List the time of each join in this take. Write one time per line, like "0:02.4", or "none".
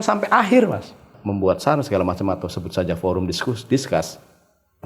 0:01.1